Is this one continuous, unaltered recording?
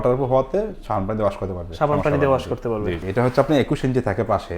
no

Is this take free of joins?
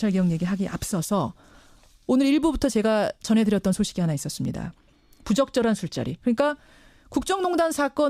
yes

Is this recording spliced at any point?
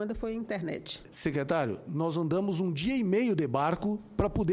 yes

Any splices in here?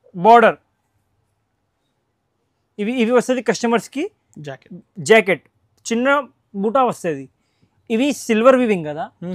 no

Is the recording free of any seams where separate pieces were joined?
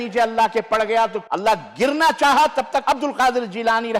no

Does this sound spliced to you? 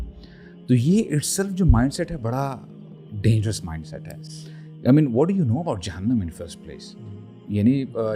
no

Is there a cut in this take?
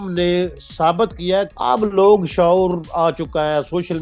yes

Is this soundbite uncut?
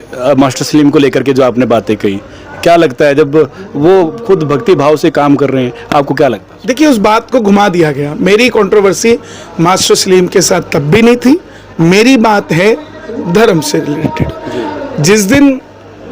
no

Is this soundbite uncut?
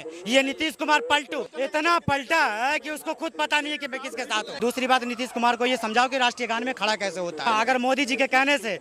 no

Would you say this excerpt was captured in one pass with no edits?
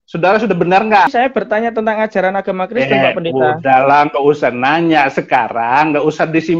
no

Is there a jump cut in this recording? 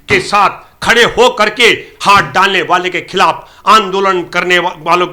no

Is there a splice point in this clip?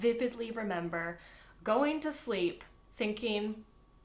no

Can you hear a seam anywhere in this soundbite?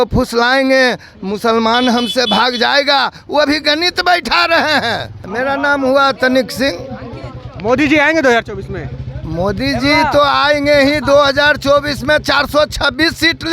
yes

